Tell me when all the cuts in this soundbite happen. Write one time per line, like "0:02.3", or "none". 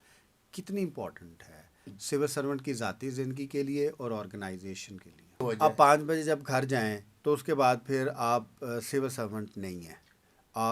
0:05.4